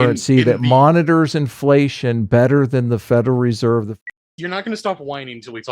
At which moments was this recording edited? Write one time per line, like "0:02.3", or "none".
0:04.0